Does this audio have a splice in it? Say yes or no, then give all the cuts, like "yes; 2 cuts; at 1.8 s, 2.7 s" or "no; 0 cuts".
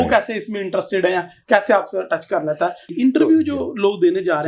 yes; 1 cut; at 2.9 s